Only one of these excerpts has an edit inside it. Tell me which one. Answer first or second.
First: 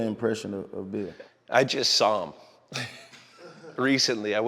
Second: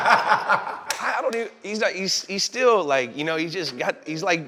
first